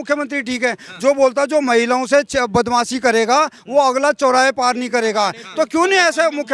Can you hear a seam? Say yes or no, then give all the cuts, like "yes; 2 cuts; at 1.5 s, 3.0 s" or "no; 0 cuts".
no; 0 cuts